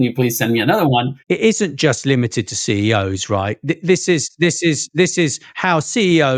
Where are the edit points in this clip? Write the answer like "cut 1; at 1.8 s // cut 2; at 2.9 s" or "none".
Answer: cut 1; at 1.2 s